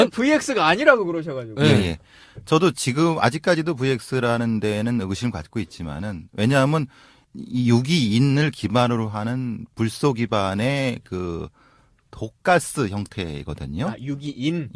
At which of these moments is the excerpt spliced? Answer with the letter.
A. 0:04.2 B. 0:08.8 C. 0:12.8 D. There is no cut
C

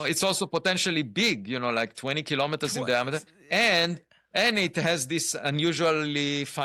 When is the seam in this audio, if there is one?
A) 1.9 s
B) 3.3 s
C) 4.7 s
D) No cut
D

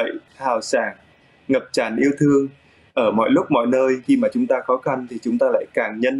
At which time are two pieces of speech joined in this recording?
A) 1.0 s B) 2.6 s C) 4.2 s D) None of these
D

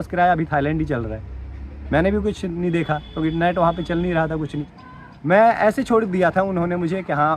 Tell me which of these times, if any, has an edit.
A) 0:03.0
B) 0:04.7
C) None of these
B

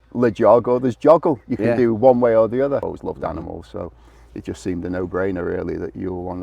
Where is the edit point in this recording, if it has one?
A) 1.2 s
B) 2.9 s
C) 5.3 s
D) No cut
B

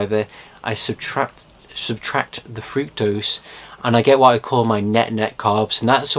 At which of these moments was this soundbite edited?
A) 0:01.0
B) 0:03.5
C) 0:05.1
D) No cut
B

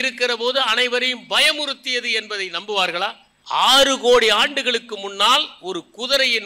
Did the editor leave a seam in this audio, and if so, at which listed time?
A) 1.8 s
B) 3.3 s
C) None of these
B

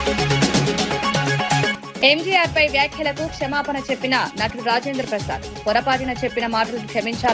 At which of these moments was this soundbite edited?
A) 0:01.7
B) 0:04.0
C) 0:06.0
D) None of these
A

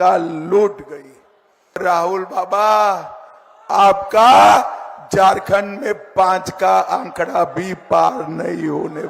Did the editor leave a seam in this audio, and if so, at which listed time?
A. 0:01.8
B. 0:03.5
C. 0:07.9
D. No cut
A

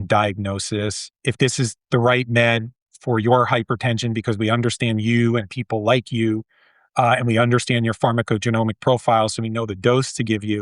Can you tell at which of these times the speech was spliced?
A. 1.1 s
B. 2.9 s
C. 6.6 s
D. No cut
A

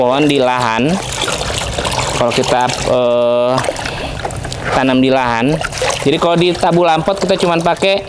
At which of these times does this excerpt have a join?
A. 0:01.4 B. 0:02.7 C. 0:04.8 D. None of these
D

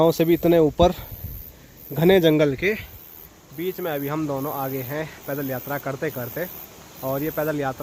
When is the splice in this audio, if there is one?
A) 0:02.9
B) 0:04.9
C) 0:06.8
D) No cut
D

